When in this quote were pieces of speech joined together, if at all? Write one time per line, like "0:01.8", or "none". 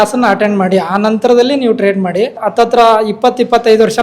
0:02.3